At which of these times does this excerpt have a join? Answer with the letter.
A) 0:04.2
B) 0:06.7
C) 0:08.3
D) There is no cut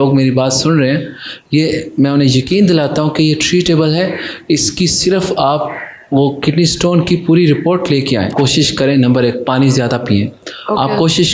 C